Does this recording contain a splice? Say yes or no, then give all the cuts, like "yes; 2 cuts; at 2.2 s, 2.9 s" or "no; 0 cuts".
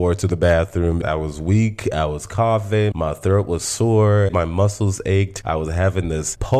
yes; 3 cuts; at 1.0 s, 4.3 s, 5.4 s